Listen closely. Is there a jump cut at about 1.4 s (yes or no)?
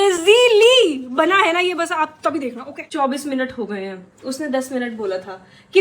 no